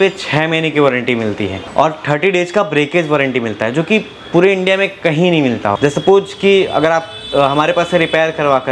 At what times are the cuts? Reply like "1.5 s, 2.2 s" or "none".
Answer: 1.6 s, 5.8 s